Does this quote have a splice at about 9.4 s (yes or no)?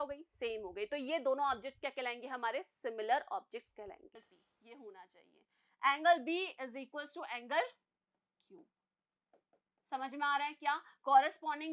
no